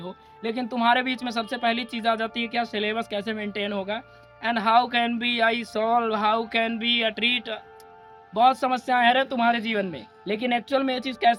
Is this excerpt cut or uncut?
uncut